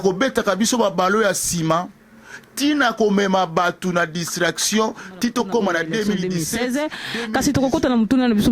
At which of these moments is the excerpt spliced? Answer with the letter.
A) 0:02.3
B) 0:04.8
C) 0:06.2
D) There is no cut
C